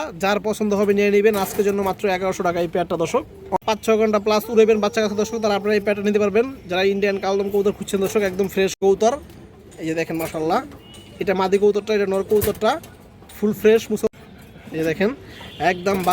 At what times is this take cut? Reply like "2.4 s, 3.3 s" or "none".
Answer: 3.6 s, 8.8 s, 14.1 s